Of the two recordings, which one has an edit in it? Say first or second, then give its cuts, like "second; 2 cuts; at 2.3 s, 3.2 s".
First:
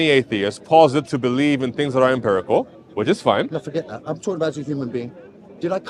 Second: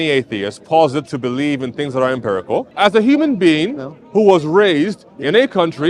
second; 1 cut; at 2.7 s